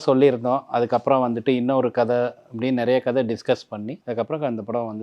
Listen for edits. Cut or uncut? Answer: cut